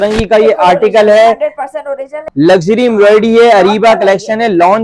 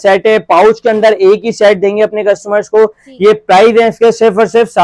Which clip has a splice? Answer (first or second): first